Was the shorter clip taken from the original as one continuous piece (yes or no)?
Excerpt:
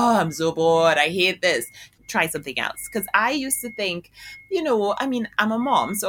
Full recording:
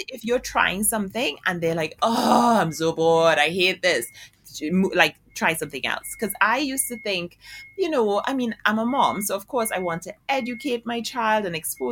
no